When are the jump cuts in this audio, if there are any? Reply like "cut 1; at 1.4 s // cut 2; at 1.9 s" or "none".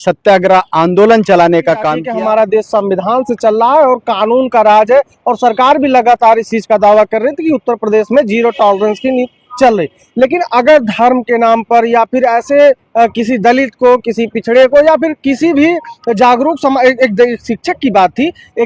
cut 1; at 2.0 s